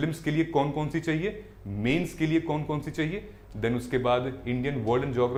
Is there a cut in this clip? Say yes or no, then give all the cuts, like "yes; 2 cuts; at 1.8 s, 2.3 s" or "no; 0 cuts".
no; 0 cuts